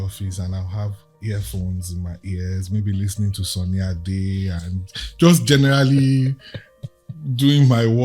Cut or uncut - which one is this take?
cut